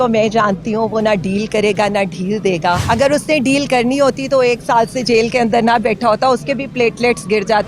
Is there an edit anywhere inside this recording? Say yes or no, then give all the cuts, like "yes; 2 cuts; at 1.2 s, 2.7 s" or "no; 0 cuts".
yes; 1 cut; at 2.8 s